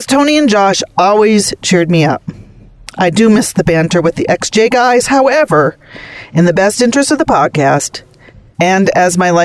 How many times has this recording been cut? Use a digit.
1